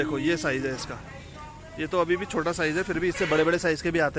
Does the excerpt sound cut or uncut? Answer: uncut